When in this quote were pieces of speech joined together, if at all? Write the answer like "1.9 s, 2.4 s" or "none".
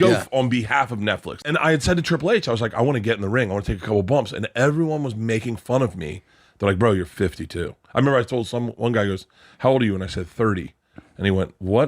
1.3 s